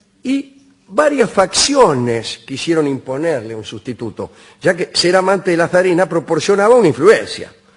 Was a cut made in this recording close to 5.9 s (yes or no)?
no